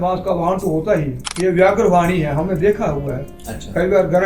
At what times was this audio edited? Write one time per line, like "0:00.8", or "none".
0:01.2